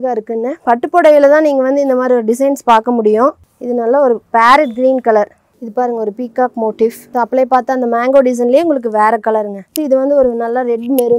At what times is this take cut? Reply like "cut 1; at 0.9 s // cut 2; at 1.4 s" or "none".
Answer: none